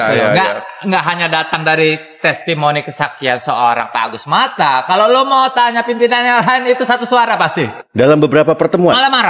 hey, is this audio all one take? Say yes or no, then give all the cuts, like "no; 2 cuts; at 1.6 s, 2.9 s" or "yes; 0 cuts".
no; 1 cut; at 7.8 s